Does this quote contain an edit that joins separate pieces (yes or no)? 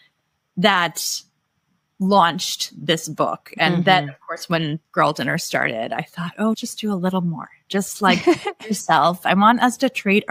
no